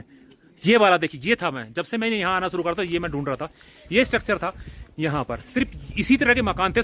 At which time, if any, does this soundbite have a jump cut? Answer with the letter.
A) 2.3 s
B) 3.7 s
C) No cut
C